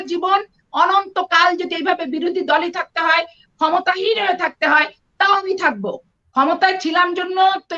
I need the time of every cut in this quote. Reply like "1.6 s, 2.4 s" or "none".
6.1 s

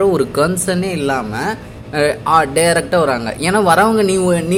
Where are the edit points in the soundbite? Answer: none

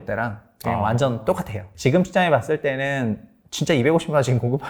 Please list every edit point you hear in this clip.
1.6 s

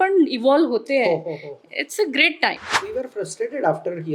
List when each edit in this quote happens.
2.7 s

